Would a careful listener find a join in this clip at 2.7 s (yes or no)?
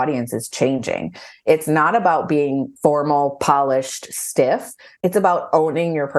yes